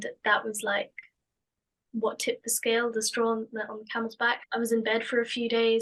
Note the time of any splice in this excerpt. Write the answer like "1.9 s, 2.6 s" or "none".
none